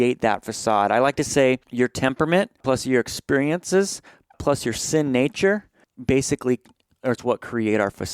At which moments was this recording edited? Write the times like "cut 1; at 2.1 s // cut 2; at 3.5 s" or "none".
cut 1; at 1.7 s // cut 2; at 2.6 s // cut 3; at 4.4 s // cut 4; at 5.9 s